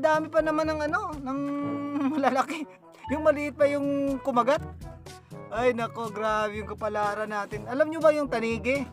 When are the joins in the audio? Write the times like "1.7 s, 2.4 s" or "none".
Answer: none